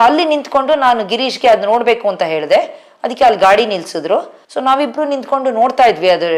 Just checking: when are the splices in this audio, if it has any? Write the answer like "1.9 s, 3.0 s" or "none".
none